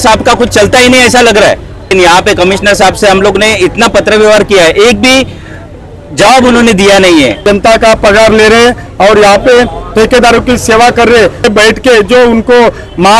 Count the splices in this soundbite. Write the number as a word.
three